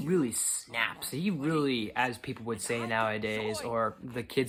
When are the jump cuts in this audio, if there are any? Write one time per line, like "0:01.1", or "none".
none

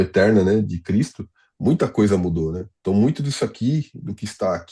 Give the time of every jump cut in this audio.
none

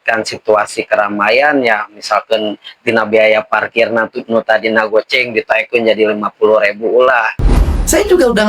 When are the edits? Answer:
0:07.6

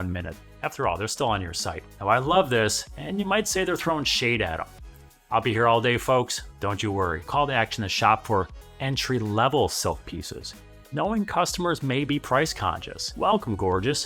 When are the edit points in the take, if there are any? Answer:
0:01.8
0:07.2
0:13.0

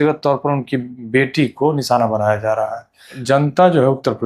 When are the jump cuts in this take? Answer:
0:03.2

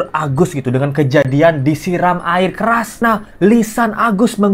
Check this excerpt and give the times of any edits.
0:03.0

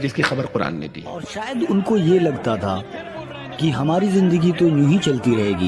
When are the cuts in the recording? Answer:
0:01.4

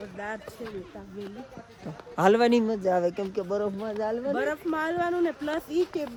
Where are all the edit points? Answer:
none

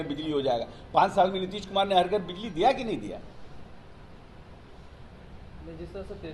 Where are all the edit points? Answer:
none

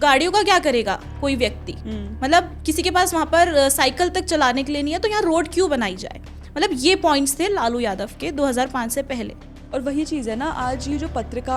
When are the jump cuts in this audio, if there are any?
none

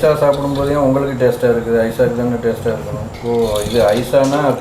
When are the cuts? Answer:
0:03.1

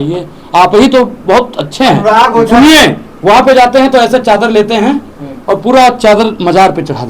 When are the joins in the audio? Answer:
none

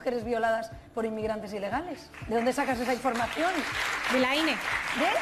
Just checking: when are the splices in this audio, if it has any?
none

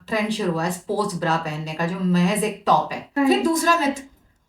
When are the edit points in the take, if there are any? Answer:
0:03.2

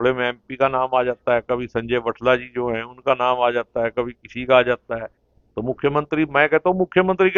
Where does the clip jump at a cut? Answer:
none

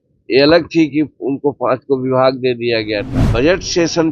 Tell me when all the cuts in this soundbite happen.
0:03.2

